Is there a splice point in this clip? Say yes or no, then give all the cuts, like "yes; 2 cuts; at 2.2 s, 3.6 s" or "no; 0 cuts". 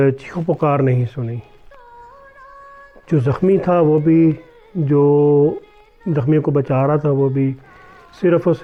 no; 0 cuts